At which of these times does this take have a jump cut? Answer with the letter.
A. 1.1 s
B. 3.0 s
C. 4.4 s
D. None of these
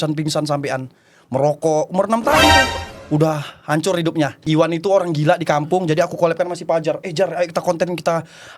C